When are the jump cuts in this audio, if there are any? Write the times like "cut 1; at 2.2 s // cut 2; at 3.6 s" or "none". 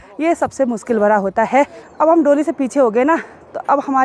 cut 1; at 1.8 s